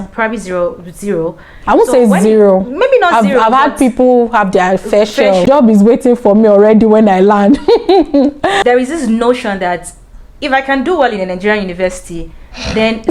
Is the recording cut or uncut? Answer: cut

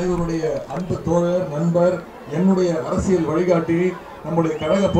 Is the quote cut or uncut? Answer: uncut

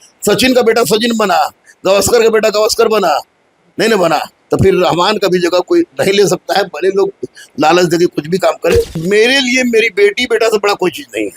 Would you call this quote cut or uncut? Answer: cut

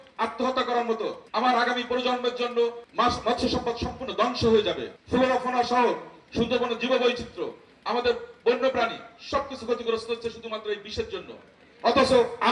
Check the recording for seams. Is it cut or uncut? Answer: cut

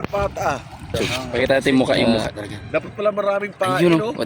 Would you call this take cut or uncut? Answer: cut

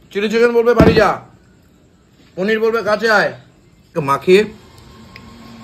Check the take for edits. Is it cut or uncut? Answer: cut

